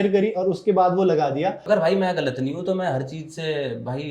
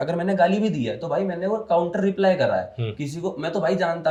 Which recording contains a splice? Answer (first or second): first